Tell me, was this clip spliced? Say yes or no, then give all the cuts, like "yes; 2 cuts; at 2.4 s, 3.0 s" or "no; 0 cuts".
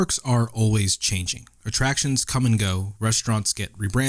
no; 0 cuts